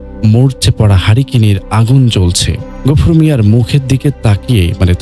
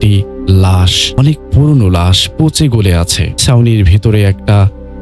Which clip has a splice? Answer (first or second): second